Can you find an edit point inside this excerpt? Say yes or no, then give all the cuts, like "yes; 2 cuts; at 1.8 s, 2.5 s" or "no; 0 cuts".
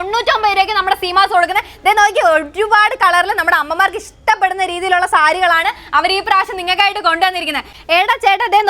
yes; 1 cut; at 7.6 s